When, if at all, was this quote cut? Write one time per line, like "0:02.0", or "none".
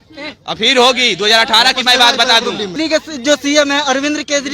0:02.7